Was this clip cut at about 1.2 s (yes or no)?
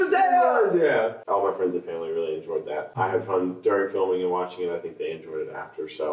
yes